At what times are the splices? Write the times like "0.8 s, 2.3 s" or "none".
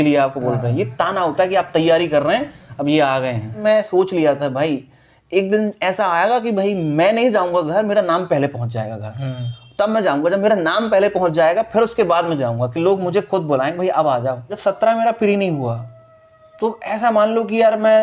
3.6 s, 14.6 s

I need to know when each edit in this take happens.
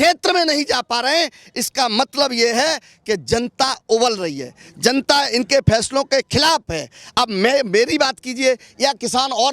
none

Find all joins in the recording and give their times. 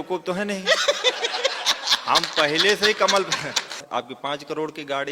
3.8 s

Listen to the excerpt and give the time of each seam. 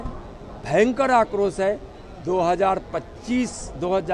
none

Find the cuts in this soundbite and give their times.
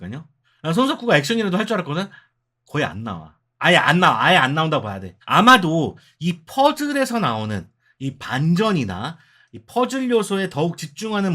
none

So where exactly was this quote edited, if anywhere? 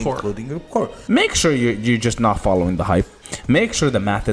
1.0 s

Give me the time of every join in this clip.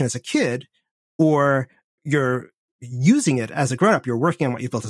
2.0 s

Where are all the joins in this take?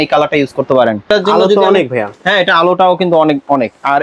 1.1 s

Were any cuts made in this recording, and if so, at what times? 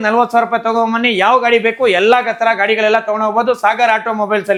none

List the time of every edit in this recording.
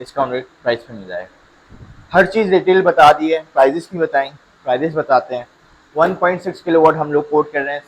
none

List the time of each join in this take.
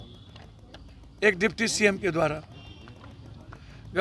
none

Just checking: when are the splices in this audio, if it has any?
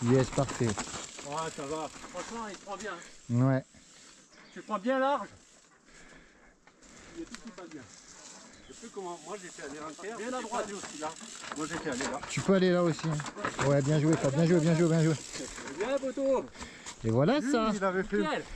none

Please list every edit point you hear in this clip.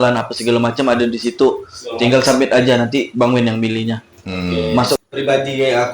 5.0 s

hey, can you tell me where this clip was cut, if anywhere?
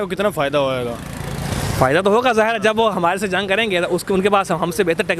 none

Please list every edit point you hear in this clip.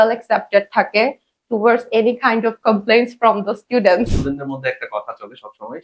4.2 s

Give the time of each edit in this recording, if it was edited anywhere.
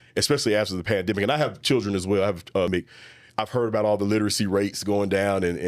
2.7 s

